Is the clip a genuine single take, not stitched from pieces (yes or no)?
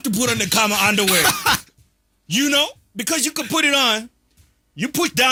yes